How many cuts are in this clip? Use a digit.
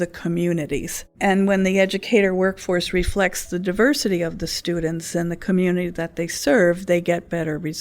1